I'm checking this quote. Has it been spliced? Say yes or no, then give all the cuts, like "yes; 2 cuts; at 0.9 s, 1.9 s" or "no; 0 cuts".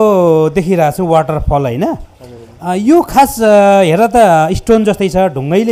no; 0 cuts